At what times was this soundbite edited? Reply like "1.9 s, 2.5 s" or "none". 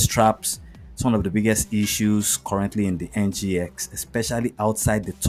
none